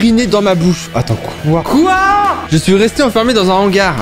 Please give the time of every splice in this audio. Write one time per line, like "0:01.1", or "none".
0:02.4